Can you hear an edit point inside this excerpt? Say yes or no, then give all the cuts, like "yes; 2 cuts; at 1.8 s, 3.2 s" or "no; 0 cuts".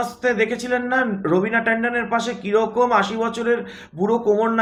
no; 0 cuts